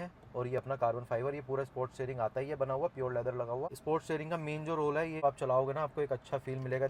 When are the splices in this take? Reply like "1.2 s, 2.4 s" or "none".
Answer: 5.2 s